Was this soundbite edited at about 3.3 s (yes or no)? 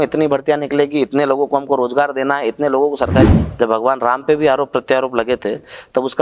yes